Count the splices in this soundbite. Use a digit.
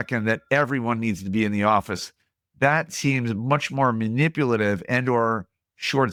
0